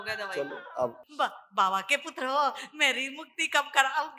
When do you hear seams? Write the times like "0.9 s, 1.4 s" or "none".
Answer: 1.0 s